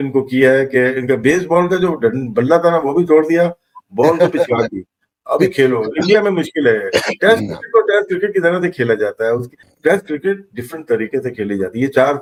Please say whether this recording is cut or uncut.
uncut